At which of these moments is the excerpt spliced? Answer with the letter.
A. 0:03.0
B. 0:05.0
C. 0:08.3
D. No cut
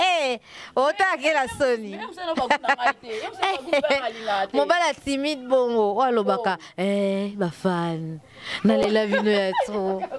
D